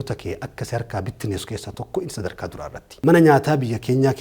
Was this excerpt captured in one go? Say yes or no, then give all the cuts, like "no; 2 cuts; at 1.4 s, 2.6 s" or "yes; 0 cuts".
no; 1 cut; at 2.8 s